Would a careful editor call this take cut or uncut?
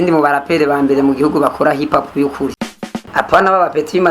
cut